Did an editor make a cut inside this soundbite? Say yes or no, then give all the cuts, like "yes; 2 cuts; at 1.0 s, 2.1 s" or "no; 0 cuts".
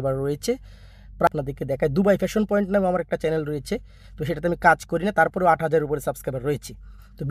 yes; 1 cut; at 1.3 s